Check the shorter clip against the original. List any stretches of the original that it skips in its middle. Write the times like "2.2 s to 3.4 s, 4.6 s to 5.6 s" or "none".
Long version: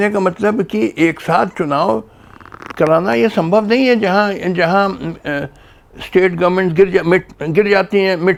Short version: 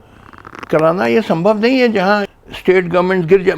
4.4 s to 5.8 s